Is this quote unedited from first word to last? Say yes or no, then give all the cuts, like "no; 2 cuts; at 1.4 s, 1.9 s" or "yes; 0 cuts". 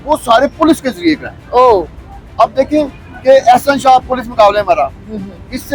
yes; 0 cuts